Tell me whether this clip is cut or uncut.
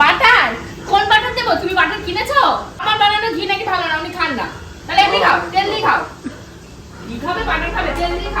cut